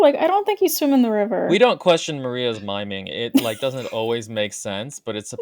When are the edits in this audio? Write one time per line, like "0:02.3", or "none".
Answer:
0:01.4